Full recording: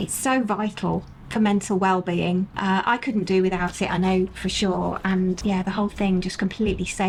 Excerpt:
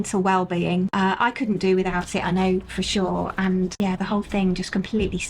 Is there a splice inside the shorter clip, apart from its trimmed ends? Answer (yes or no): yes